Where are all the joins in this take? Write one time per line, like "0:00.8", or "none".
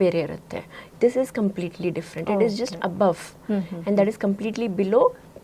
none